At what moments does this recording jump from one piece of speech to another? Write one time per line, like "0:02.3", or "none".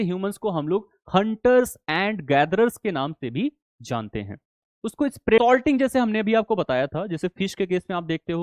0:05.0